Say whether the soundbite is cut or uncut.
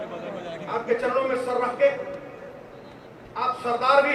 uncut